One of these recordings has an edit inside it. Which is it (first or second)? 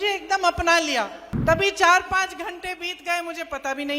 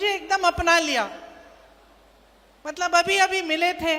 first